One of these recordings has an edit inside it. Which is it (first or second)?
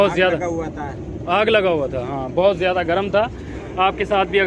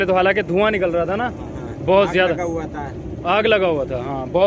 first